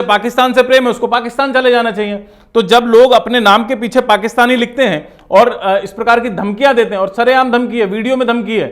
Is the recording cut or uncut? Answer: uncut